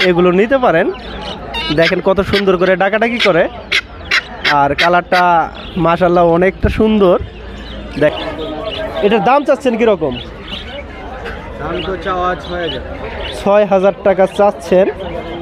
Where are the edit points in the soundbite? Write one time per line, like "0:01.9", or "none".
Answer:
0:08.1